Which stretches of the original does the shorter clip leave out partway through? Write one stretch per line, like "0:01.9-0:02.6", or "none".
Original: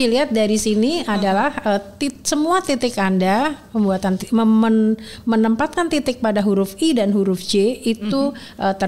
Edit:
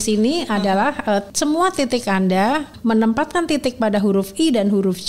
0:01.9-0:02.2
0:03.6-0:05.1